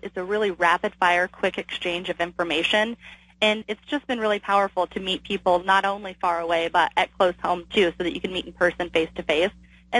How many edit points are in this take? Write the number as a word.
two